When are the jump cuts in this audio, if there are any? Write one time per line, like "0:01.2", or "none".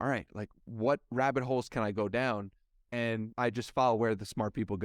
0:03.3